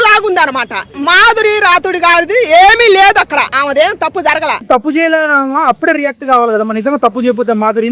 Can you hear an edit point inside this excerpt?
yes; 3 cuts; at 0.9 s, 3.5 s, 4.6 s

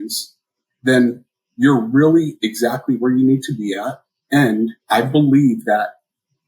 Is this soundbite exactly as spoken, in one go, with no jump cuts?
no; 1 cut; at 4.8 s

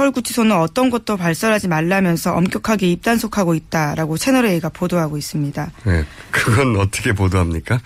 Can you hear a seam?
yes; 1 cut; at 5.2 s

